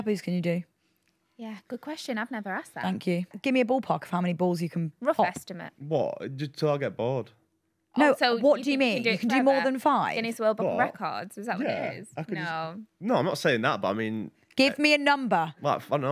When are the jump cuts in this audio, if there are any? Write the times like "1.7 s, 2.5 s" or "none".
3.3 s

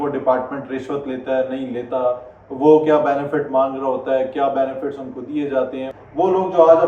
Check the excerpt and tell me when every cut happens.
5.9 s

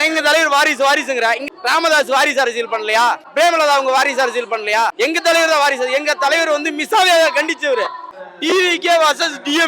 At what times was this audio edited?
1.4 s, 3.2 s, 4.9 s, 8.2 s

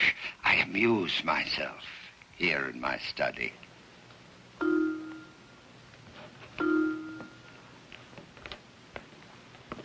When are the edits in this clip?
none

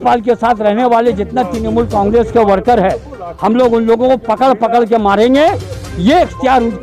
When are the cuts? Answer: none

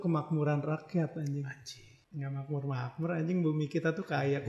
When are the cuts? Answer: none

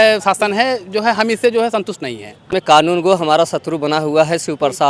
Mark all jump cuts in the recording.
2.5 s

